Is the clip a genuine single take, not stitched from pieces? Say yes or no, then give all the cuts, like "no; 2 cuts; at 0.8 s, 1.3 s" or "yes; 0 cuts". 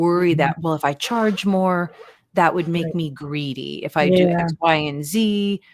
yes; 0 cuts